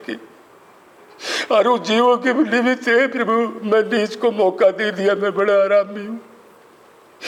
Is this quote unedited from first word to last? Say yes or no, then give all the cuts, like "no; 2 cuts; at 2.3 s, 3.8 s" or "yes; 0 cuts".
yes; 0 cuts